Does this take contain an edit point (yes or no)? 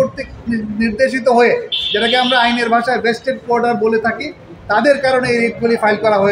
no